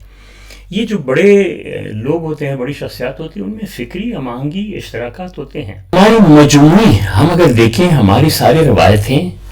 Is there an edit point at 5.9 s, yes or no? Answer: yes